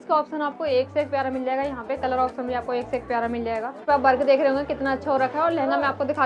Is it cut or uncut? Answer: cut